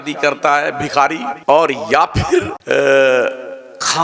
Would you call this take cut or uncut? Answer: cut